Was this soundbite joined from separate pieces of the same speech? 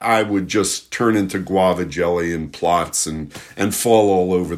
no; 0 cuts

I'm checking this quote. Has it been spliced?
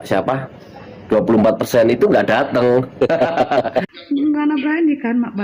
yes; 1 cut; at 3.8 s

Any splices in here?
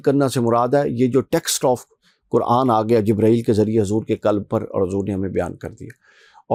no; 0 cuts

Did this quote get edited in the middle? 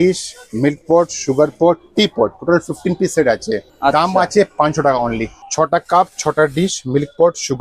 yes; 2 cuts; at 3.7 s, 5.4 s

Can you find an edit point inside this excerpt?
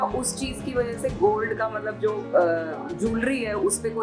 no; 0 cuts

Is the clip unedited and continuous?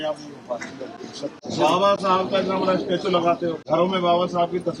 no; 2 cuts; at 1.4 s, 3.6 s

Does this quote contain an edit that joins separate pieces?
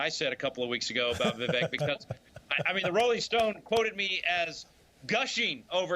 yes; 1 cut; at 2.8 s

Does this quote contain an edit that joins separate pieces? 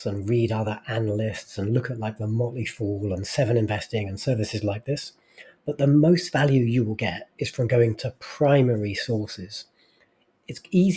no; 0 cuts

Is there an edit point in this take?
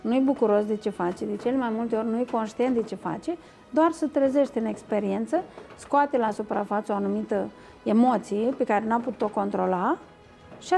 no; 0 cuts

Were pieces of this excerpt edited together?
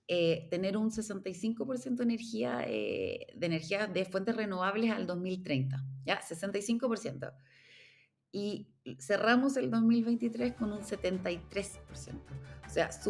no; 0 cuts

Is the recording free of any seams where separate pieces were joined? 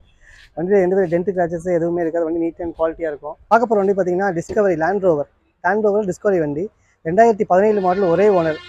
no; 1 cut; at 3.5 s

